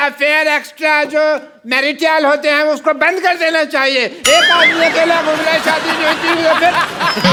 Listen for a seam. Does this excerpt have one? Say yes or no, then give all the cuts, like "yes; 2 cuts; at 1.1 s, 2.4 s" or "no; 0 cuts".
no; 0 cuts